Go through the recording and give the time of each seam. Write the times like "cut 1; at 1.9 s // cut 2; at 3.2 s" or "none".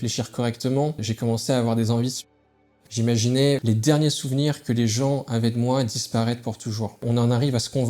cut 1; at 1.1 s // cut 2; at 2.8 s // cut 3; at 3.6 s // cut 4; at 7.0 s